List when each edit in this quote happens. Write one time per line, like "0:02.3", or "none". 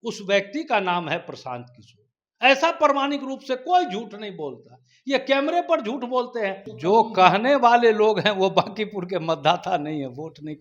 0:06.7